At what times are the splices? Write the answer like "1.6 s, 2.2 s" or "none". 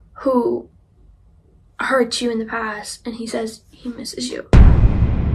4.4 s